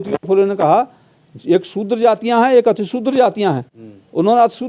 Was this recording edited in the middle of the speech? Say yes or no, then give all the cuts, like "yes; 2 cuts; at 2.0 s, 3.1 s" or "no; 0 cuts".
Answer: no; 0 cuts